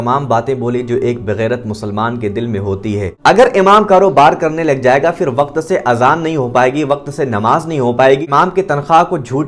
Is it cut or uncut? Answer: cut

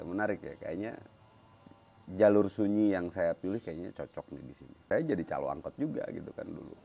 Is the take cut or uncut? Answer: cut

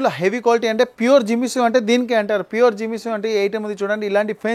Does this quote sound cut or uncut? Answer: uncut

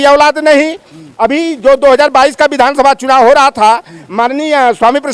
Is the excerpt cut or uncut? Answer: uncut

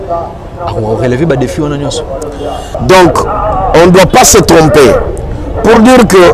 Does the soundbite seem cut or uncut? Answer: uncut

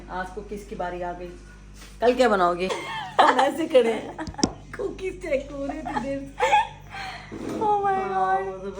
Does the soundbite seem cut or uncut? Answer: cut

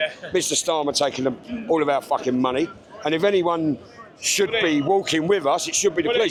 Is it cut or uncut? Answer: uncut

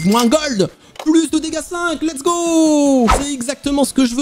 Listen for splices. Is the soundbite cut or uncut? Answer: cut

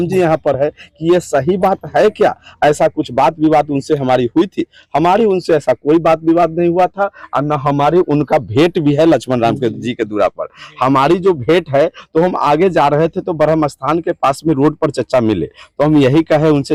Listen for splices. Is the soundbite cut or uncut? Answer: uncut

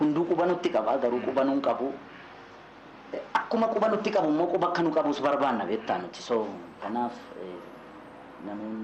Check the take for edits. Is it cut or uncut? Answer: uncut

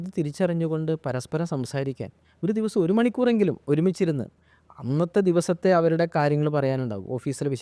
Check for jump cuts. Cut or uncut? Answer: uncut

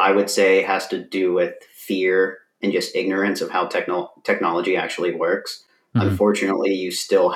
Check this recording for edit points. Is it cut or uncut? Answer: uncut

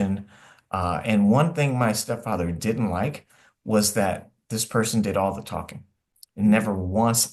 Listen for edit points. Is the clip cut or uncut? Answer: uncut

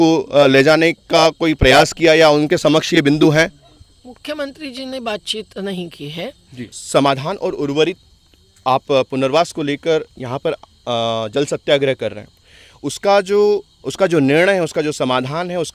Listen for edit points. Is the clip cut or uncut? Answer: cut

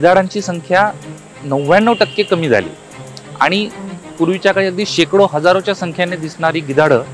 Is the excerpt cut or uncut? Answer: uncut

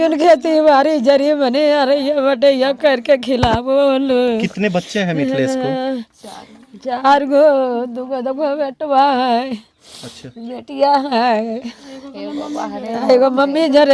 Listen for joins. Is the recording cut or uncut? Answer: uncut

